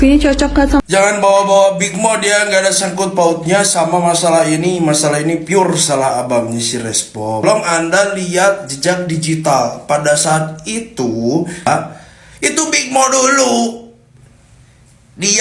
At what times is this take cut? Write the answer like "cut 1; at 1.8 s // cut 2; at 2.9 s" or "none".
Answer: cut 1; at 0.8 s // cut 2; at 7.4 s // cut 3; at 11.7 s